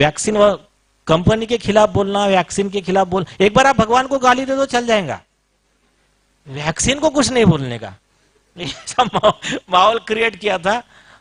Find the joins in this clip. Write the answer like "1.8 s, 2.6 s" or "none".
none